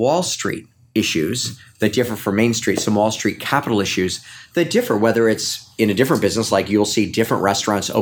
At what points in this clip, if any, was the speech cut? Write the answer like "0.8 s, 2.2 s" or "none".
none